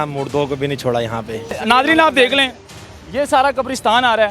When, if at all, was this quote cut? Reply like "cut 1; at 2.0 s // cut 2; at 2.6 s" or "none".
cut 1; at 1.6 s